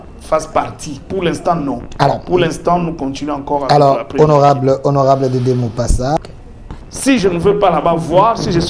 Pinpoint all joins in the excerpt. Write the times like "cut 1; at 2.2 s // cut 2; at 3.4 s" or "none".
cut 1; at 6.2 s

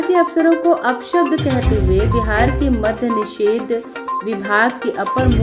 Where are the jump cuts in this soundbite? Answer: none

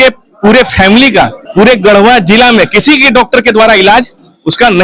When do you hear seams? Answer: cut 1; at 1.4 s

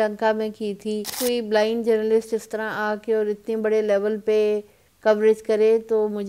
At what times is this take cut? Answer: cut 1; at 1.2 s

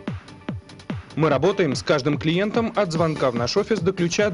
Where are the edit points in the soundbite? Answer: cut 1; at 1.0 s

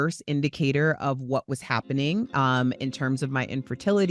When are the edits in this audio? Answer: none

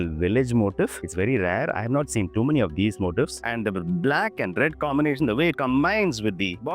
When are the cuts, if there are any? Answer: cut 1; at 3.4 s

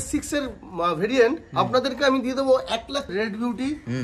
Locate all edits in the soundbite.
cut 1; at 3.1 s

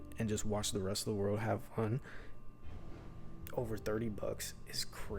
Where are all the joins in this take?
none

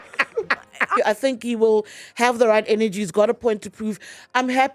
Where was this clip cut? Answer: cut 1; at 0.9 s

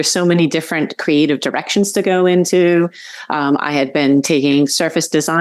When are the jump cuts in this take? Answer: none

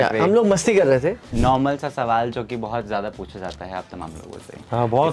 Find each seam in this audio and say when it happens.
cut 1; at 1.3 s

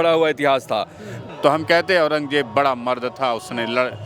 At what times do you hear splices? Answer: cut 1; at 1.2 s

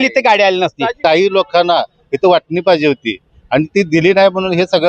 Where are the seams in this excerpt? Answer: cut 1; at 1.0 s

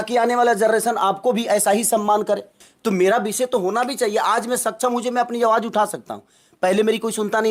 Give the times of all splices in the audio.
cut 1; at 2.7 s

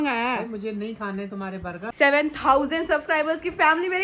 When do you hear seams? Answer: cut 1; at 1.7 s

